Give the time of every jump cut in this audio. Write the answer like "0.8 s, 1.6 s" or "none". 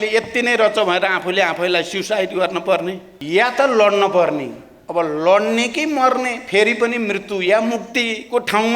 3.1 s